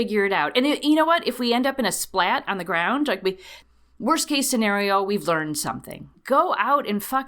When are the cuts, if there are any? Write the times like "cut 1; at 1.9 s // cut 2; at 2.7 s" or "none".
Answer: cut 1; at 3.5 s // cut 2; at 6.1 s